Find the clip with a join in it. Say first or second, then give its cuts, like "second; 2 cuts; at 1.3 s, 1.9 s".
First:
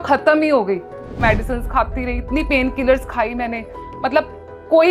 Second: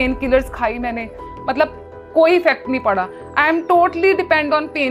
first; 1 cut; at 1.2 s